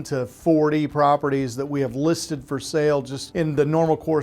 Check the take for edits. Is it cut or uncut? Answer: cut